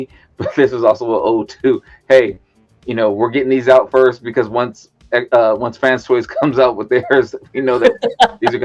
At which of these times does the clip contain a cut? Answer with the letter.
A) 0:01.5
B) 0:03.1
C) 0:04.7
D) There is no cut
D